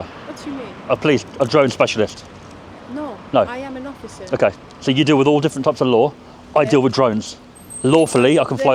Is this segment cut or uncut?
uncut